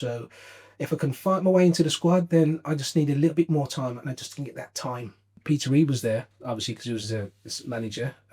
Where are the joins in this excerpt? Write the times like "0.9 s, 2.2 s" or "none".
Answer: 5.3 s